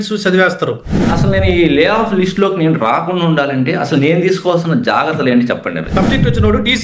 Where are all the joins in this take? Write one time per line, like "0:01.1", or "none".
0:01.2
0:05.8